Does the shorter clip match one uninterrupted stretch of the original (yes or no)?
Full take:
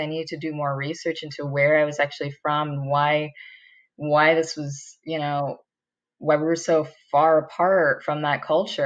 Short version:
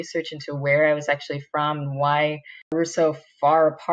no